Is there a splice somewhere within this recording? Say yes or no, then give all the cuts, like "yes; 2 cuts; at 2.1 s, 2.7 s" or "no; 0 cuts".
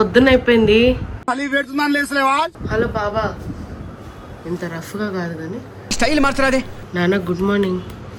no; 0 cuts